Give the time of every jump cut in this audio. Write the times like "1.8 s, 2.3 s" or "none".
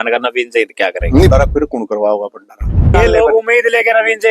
1.3 s, 2.9 s